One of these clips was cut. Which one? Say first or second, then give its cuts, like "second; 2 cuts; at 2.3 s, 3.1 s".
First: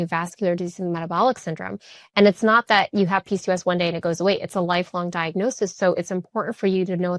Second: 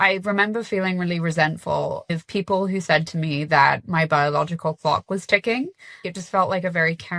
second; 2 cuts; at 2.1 s, 6.1 s